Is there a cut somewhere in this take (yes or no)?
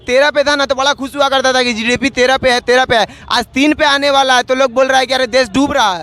no